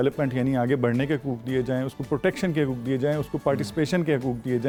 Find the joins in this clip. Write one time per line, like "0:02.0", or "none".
none